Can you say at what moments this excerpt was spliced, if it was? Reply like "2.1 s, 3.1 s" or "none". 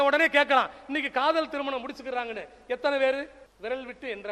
3.4 s